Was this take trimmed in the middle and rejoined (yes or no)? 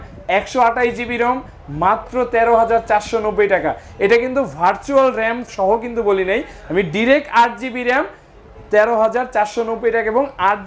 yes